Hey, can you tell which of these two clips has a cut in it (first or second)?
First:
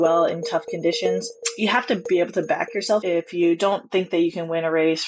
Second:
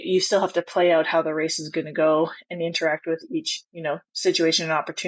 first